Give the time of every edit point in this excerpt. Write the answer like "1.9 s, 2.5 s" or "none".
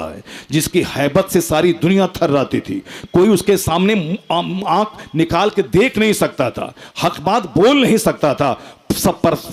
none